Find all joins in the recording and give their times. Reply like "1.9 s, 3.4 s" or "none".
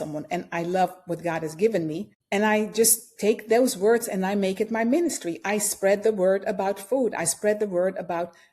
2.1 s